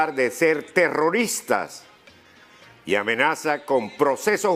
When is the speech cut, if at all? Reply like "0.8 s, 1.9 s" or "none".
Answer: 3.4 s

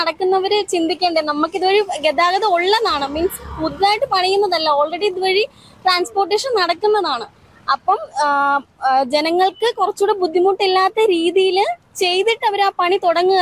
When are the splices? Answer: none

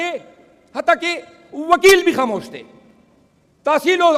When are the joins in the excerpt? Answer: none

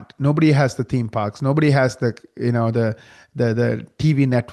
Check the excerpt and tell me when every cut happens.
none

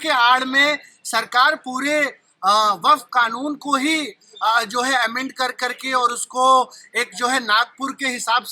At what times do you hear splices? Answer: none

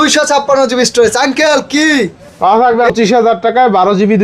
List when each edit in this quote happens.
2.9 s

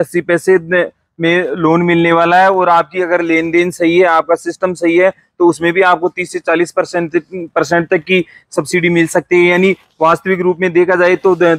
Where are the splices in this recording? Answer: none

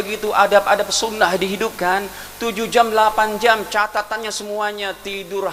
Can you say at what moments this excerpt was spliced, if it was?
none

